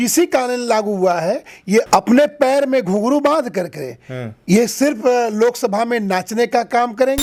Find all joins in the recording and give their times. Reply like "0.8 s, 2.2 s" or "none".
none